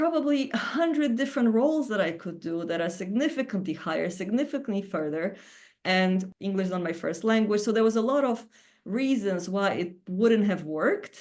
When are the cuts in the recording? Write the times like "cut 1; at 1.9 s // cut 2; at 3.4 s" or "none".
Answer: cut 1; at 6.3 s